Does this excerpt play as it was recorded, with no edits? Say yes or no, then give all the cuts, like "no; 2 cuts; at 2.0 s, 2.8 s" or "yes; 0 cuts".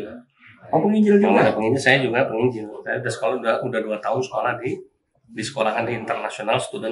yes; 0 cuts